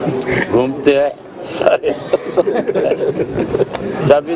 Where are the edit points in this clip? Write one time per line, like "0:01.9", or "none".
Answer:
none